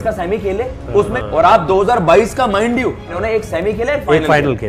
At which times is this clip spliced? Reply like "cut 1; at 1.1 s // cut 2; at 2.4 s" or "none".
cut 1; at 1.2 s // cut 2; at 3.2 s